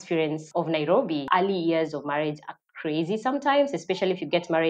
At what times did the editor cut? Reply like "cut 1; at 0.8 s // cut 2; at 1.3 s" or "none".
cut 1; at 1.2 s